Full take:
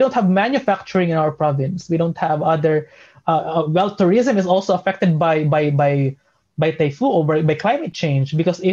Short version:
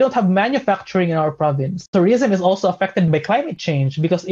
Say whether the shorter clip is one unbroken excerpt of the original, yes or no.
no